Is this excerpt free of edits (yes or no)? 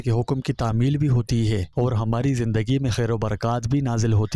yes